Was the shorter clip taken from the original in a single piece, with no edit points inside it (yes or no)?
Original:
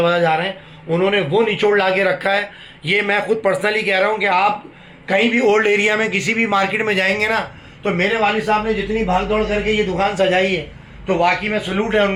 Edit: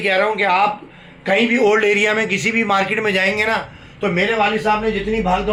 yes